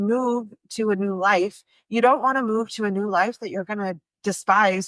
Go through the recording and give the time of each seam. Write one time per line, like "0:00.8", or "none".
none